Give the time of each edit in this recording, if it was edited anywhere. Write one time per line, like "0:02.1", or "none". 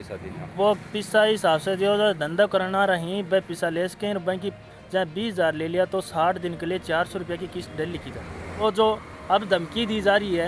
0:08.6